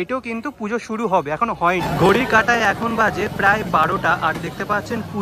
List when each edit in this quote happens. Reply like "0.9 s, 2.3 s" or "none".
1.9 s